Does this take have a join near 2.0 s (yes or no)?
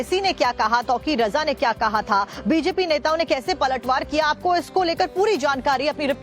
yes